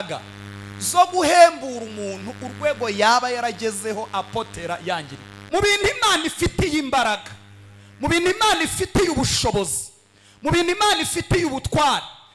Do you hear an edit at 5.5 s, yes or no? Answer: yes